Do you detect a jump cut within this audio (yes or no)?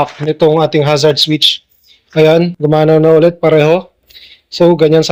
no